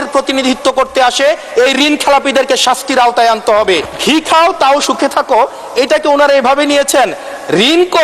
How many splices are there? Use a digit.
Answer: 1